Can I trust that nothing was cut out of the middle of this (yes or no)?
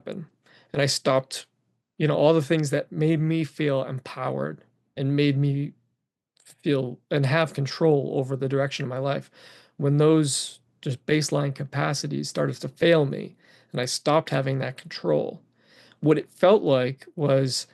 yes